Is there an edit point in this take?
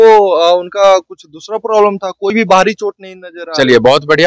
no; 0 cuts

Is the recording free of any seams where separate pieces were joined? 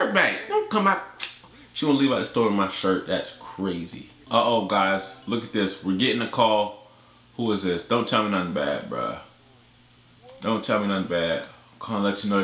no; 1 cut; at 4.2 s

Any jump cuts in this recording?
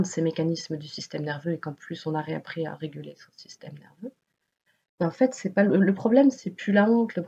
no; 0 cuts

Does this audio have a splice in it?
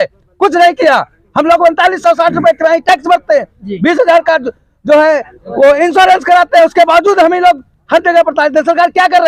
no; 0 cuts

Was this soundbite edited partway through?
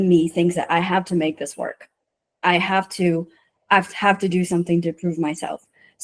no; 0 cuts

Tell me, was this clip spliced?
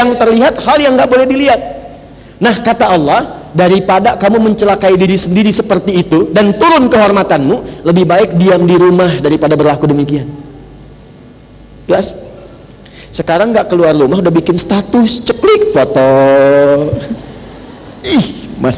no; 0 cuts

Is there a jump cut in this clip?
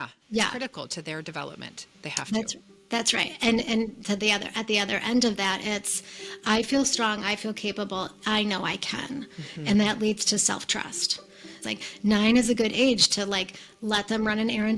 yes; 1 cut; at 11.6 s

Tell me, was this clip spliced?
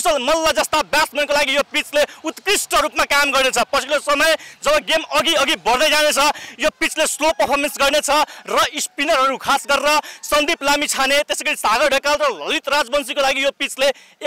no; 0 cuts

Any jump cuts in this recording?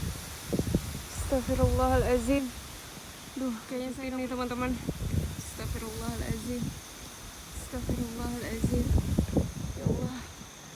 yes; 1 cut; at 4.0 s

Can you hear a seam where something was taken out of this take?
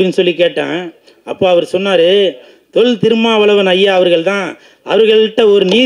no; 0 cuts

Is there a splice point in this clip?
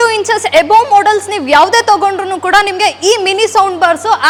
no; 0 cuts

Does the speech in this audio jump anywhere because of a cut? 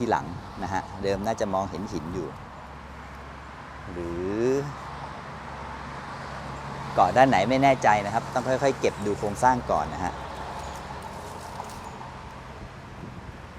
no; 0 cuts

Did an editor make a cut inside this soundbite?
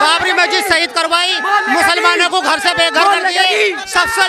no; 0 cuts

